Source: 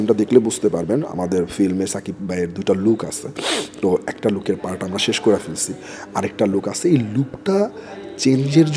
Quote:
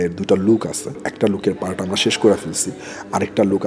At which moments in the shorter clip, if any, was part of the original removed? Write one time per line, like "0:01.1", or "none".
0:01.0